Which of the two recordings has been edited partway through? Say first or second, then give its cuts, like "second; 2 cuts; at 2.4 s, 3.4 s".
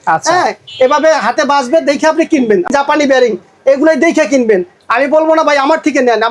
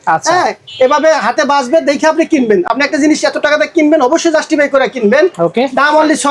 first; 1 cut; at 2.7 s